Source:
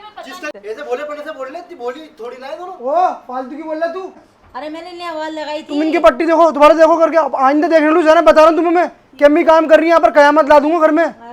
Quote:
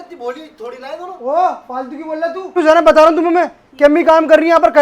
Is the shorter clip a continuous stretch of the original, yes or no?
no